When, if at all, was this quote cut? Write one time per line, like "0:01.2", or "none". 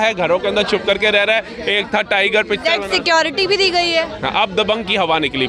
none

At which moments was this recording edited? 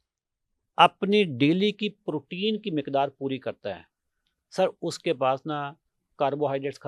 none

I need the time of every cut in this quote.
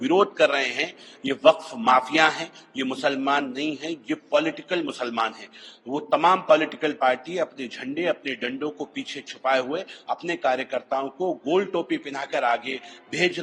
none

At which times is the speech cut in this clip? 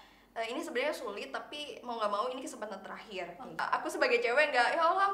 0:03.6

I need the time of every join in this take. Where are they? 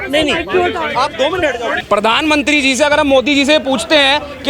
0:01.8

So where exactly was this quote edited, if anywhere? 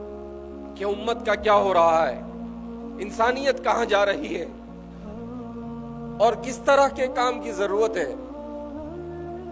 0:04.5
0:05.9
0:08.2

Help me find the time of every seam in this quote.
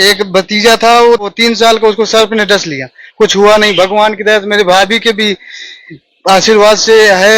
0:01.3

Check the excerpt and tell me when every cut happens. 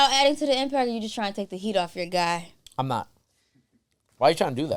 none

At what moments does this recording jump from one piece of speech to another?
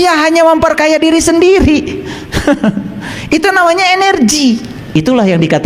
0:04.7

